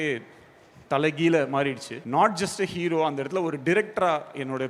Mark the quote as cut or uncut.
cut